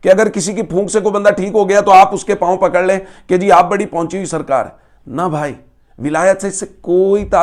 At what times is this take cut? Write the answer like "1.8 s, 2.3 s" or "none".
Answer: none